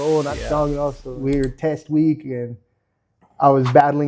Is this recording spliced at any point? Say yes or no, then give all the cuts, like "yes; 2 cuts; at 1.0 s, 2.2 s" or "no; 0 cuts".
yes; 1 cut; at 1.1 s